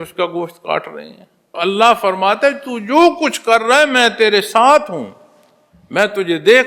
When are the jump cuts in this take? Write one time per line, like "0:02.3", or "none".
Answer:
0:01.6